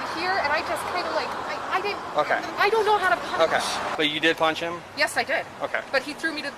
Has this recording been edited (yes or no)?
yes